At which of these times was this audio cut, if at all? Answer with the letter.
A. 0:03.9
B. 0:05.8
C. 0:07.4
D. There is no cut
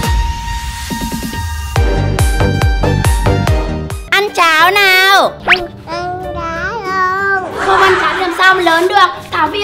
A